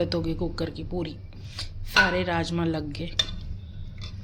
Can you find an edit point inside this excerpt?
no; 0 cuts

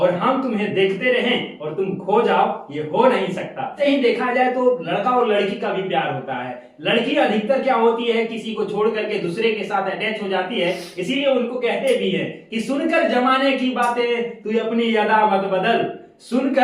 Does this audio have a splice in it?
yes; 1 cut; at 3.8 s

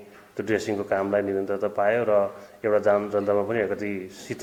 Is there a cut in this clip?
no; 0 cuts

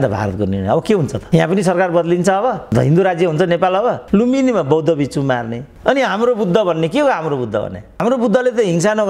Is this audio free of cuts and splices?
no; 1 cut; at 4.0 s

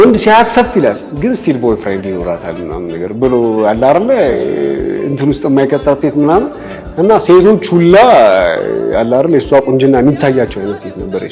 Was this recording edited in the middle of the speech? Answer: no; 0 cuts

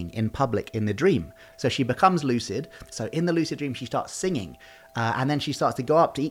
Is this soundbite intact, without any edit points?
no; 2 cuts; at 1.4 s, 2.8 s

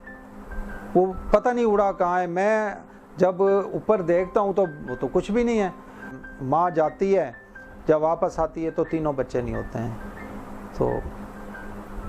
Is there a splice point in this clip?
yes; 1 cut; at 6.2 s

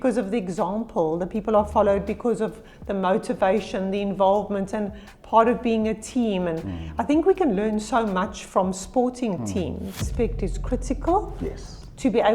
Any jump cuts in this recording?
yes; 1 cut; at 10.0 s

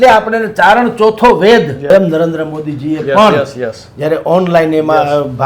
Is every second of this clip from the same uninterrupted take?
no; 1 cut; at 1.9 s

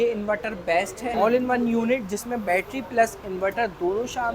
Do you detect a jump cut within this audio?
yes; 1 cut; at 1.0 s

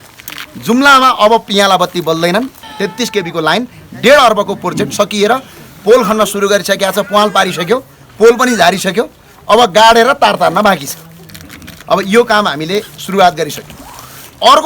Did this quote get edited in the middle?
yes; 1 cut; at 2.5 s

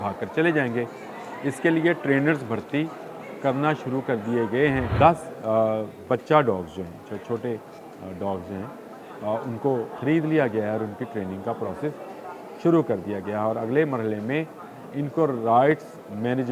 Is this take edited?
yes; 1 cut; at 4.9 s

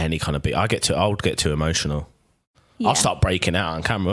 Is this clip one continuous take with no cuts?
yes; 0 cuts

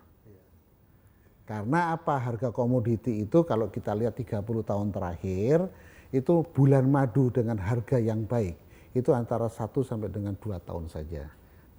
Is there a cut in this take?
no; 0 cuts

